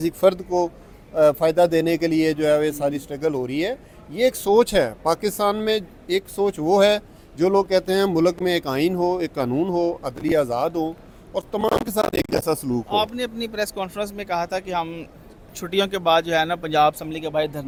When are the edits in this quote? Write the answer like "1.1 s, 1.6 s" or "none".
none